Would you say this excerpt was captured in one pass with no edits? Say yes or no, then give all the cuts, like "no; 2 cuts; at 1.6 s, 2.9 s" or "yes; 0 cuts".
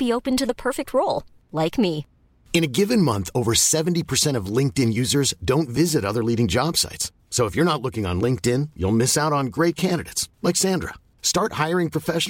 yes; 0 cuts